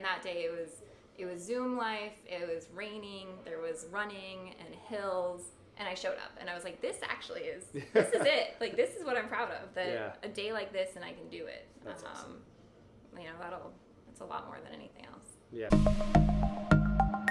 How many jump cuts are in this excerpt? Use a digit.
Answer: 1